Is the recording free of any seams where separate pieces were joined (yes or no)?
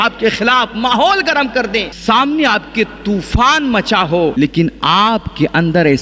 no